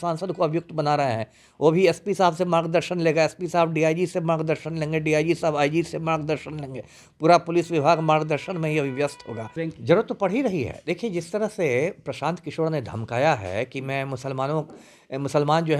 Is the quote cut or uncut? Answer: cut